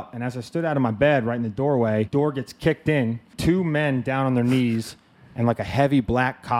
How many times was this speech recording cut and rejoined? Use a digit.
2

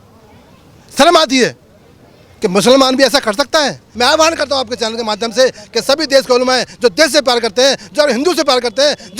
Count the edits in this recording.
1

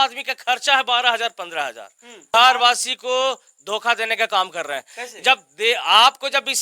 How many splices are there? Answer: 1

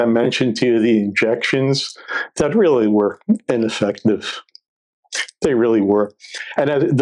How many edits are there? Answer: 0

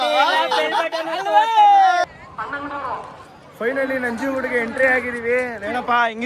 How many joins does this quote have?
1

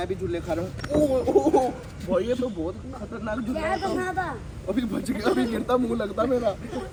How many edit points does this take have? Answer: 0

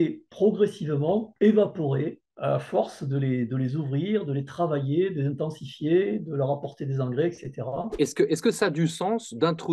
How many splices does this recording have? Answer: 2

